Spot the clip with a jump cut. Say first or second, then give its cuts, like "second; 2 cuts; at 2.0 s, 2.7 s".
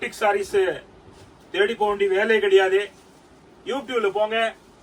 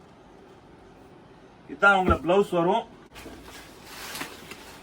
second; 1 cut; at 3.1 s